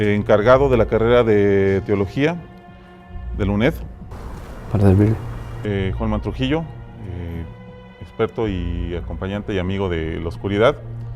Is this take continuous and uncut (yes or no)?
no